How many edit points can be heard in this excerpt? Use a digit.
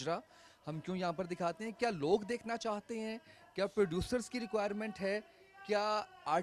0